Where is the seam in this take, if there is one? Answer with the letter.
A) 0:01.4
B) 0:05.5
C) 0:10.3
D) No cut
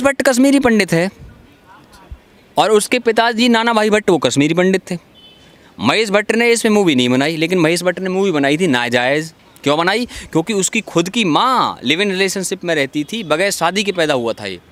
D